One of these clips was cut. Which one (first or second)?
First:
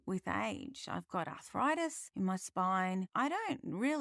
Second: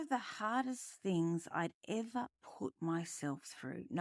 first